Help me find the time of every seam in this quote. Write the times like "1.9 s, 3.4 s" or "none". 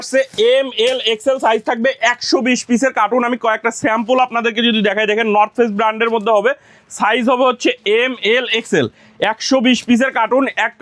none

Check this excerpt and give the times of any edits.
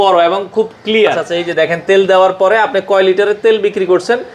1.2 s

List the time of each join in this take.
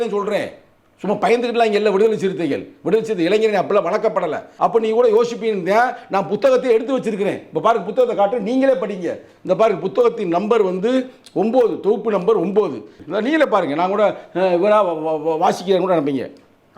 4.5 s, 13.0 s

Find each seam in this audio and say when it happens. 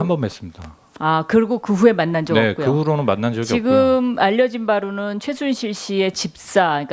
3.9 s

